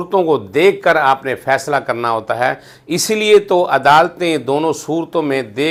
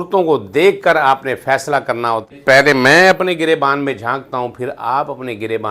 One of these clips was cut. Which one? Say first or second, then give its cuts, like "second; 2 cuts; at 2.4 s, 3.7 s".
second; 1 cut; at 2.3 s